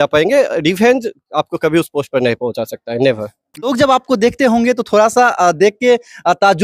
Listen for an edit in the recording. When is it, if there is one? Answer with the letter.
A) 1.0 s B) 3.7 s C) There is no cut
B